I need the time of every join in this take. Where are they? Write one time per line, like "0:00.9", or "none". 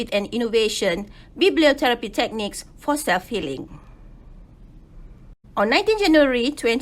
0:05.4